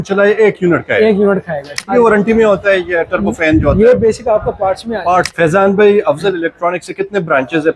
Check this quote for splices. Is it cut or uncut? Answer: cut